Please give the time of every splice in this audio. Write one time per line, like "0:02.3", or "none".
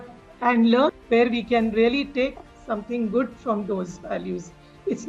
0:00.9